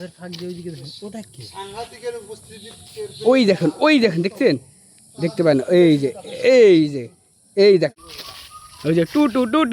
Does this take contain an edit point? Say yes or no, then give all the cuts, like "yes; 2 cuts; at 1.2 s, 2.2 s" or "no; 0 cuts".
yes; 1 cut; at 8.0 s